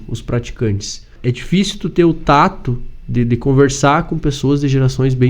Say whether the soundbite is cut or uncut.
cut